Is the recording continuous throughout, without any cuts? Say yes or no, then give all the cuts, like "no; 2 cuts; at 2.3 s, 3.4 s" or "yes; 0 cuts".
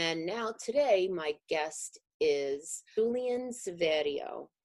no; 1 cut; at 3.0 s